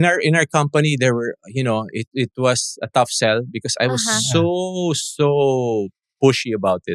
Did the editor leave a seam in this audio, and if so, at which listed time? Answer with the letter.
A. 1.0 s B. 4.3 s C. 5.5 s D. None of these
D